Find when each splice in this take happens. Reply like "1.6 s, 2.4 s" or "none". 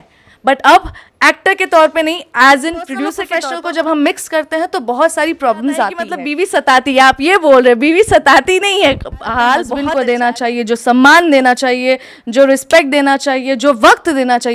3.3 s, 6.2 s, 9.8 s